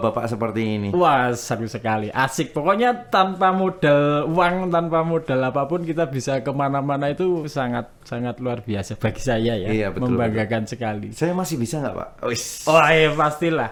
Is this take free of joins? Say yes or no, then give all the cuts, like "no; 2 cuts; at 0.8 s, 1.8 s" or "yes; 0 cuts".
yes; 0 cuts